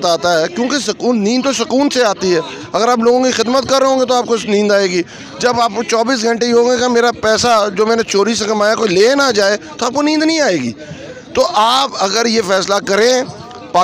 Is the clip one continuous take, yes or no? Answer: yes